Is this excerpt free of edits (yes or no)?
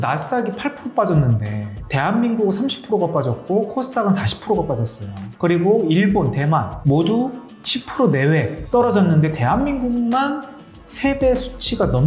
yes